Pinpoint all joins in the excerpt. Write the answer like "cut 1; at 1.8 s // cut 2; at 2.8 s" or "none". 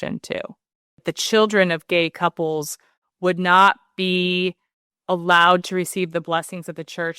cut 1; at 1.0 s